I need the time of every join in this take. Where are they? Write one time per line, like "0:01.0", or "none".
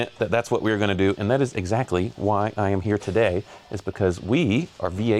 none